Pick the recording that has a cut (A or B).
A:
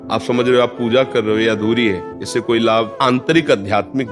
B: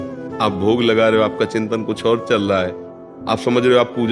A